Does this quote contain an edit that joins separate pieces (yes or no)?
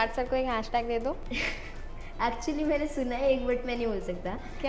yes